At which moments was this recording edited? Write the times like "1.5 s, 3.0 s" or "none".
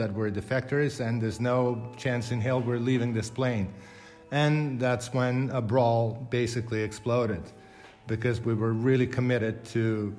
none